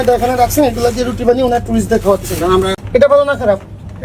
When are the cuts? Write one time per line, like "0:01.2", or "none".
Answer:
0:02.8